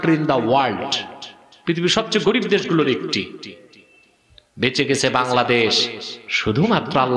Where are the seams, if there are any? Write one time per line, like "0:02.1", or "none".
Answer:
none